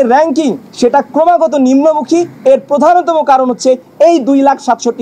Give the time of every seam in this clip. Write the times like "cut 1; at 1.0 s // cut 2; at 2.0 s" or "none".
none